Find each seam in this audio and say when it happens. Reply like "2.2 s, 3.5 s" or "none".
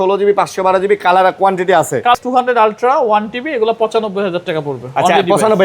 2.2 s